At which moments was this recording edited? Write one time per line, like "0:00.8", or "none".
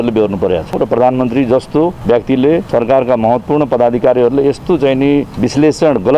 0:00.7
0:02.0
0:02.7
0:05.3

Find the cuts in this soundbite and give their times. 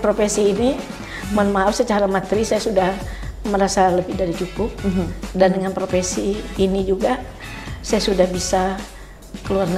none

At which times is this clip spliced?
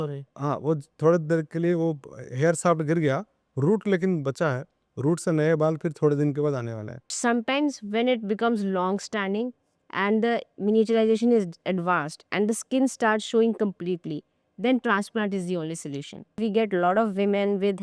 0:07.1
0:16.4

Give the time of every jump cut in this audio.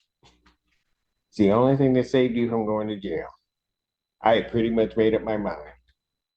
none

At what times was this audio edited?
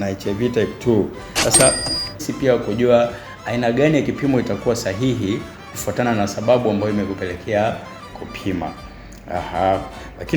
0:02.2

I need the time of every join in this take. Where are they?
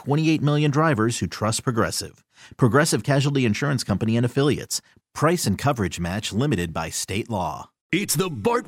0:07.7

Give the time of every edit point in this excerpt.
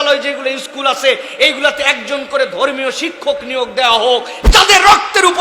0:04.4

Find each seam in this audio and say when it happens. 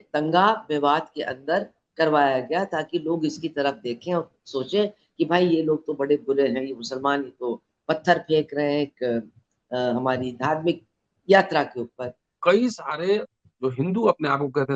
0:12.4

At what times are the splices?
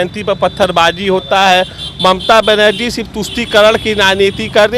none

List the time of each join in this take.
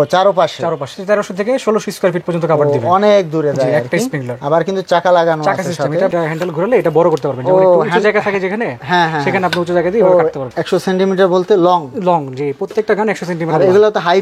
0:00.9
0:06.1
0:10.5

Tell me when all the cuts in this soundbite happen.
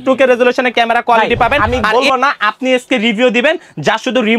0:01.6

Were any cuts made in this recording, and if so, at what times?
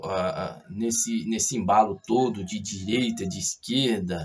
none

